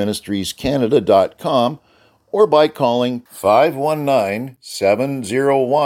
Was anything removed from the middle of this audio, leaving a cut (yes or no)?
no